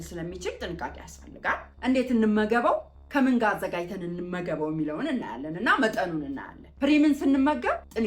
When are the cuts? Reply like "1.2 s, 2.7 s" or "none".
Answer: 1.7 s, 6.7 s